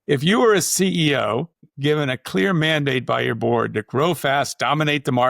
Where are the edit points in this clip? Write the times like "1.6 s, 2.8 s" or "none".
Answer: 1.6 s